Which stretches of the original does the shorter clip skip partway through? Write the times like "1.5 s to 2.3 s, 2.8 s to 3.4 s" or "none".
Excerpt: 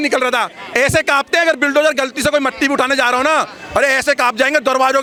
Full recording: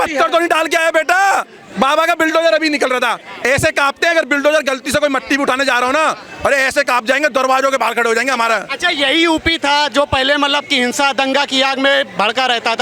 none